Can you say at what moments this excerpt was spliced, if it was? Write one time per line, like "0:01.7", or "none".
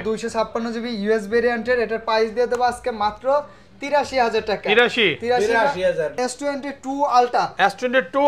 0:06.2

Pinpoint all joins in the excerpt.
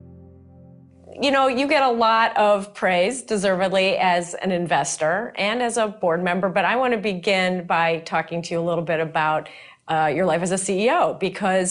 none

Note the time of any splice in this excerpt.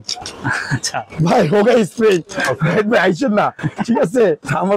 none

